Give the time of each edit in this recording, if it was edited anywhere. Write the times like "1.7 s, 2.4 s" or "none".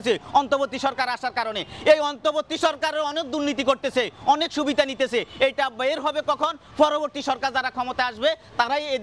none